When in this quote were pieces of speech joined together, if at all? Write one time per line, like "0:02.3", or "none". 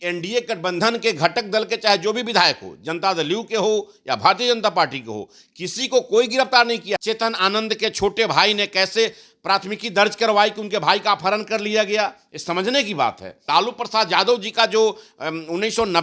0:06.9
0:13.4